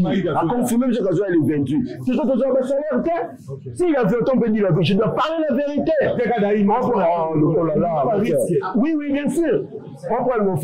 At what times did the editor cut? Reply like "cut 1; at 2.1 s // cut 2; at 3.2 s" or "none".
cut 1; at 2.0 s